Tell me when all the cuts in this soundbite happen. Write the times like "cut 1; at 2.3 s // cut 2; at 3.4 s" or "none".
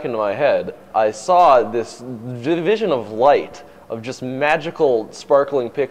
none